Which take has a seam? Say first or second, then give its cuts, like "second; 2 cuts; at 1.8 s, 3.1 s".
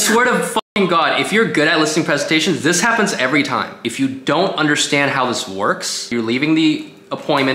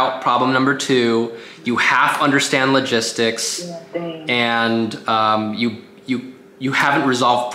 first; 2 cuts; at 3.8 s, 6.1 s